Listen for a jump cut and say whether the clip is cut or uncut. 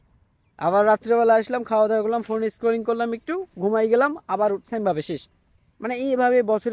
uncut